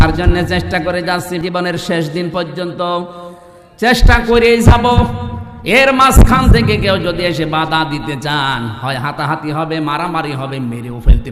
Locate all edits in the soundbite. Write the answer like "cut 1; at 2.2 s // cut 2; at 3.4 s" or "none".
cut 1; at 1.4 s